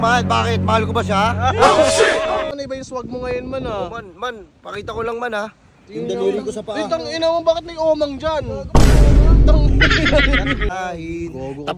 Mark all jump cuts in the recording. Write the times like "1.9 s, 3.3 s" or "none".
2.5 s, 10.7 s